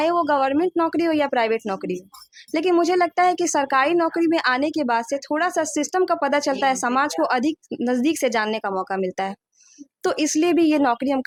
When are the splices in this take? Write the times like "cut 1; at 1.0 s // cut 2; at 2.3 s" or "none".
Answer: none